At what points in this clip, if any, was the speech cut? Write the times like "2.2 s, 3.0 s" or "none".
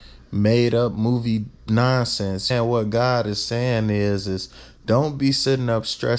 2.5 s